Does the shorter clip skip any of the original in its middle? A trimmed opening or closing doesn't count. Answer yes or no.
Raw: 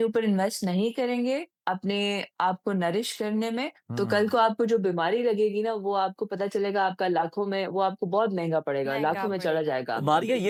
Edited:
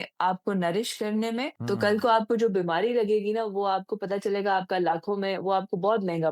yes